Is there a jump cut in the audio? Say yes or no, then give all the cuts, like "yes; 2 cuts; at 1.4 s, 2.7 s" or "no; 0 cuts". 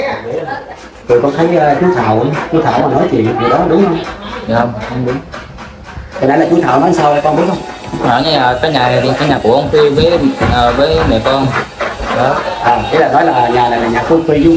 no; 0 cuts